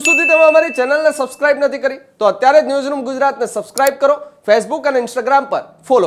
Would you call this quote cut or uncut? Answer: uncut